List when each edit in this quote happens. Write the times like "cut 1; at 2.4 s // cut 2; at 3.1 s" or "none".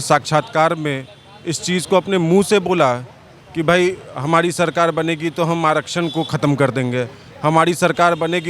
none